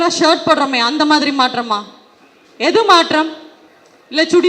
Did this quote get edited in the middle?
no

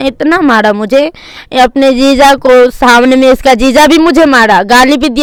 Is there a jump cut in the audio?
no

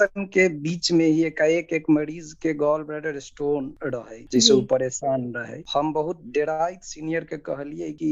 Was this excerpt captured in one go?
yes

